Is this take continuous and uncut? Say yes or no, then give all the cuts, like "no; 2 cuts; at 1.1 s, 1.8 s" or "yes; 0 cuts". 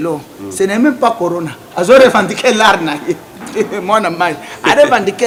yes; 0 cuts